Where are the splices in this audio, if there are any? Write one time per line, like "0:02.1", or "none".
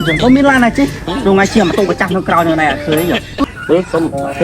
0:03.3